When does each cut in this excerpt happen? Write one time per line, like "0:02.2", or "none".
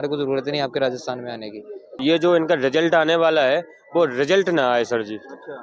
0:01.9